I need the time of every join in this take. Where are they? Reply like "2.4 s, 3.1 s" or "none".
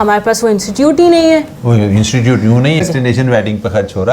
2.8 s